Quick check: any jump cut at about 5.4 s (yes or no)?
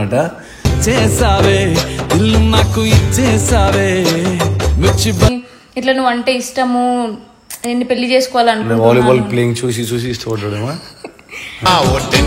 yes